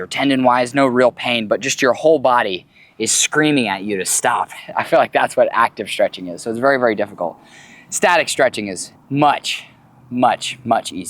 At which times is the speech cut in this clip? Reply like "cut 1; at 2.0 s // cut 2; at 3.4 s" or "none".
cut 1; at 8.9 s

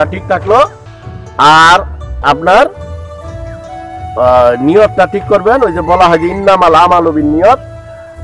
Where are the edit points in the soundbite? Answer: cut 1; at 2.7 s // cut 2; at 4.1 s

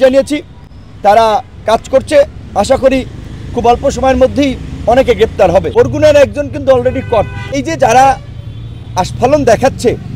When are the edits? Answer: cut 1; at 5.7 s // cut 2; at 7.6 s

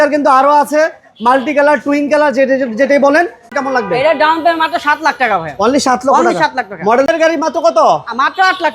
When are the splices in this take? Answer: cut 1; at 3.4 s // cut 2; at 7.1 s

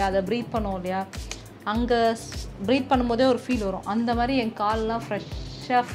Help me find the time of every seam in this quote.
none

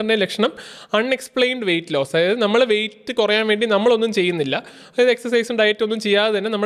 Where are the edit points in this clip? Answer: none

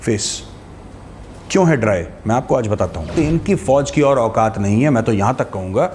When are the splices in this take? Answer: cut 1; at 3.1 s

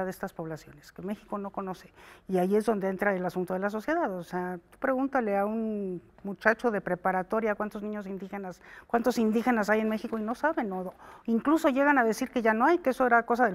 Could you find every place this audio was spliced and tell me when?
none

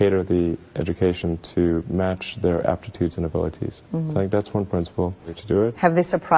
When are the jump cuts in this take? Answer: cut 1; at 5.4 s

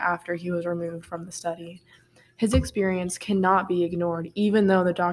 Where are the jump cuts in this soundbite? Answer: none

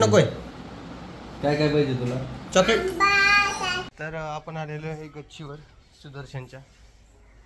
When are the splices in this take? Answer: cut 1; at 3.8 s

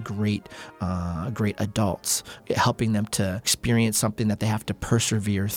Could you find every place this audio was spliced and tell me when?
cut 1; at 2.4 s // cut 2; at 3.5 s

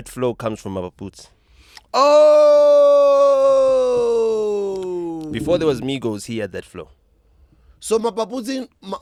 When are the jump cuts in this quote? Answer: none

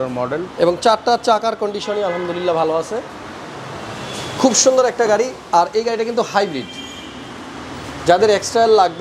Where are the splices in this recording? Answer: none

